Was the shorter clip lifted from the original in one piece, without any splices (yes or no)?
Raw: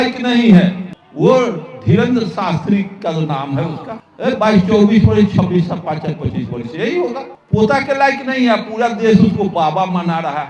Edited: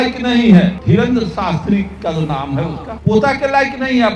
no